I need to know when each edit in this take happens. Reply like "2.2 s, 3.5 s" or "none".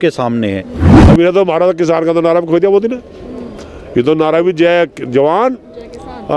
0.9 s